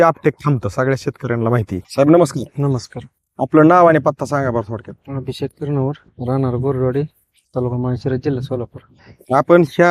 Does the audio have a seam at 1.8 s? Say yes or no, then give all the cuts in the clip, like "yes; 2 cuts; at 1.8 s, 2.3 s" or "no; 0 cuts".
yes; 1 cut; at 1.8 s